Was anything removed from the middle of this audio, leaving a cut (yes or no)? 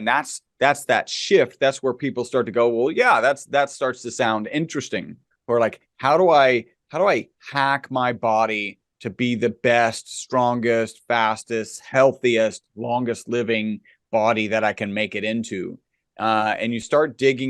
yes